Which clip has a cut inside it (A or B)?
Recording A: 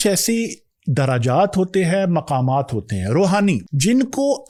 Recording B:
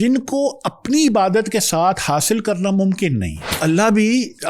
B